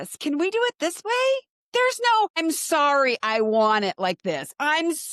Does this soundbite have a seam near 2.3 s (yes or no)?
yes